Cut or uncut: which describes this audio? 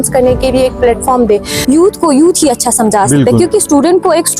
cut